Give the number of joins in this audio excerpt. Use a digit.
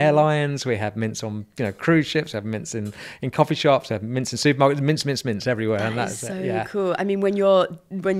0